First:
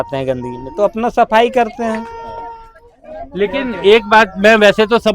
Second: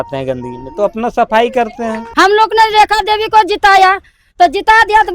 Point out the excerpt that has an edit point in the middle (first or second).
second